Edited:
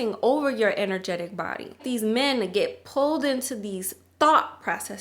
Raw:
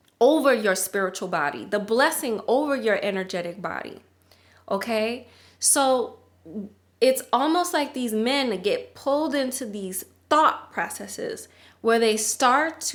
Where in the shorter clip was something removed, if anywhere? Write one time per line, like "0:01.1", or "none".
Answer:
0:01.8

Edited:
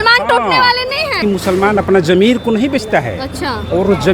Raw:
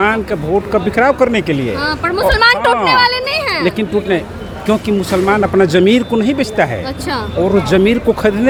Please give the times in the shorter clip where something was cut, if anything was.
0:01.2

